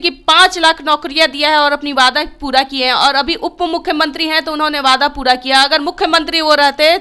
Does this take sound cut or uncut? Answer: uncut